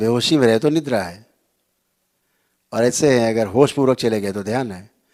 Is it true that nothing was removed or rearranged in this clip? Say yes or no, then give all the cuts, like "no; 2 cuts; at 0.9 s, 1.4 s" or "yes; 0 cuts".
yes; 0 cuts